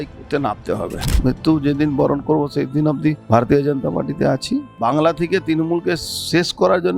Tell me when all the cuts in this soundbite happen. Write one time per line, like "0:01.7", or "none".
0:01.1
0:03.2
0:04.7